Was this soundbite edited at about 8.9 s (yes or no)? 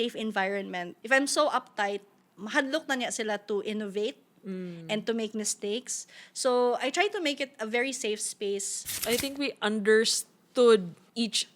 yes